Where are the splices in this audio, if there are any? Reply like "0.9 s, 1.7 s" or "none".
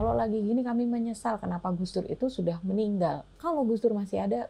3.3 s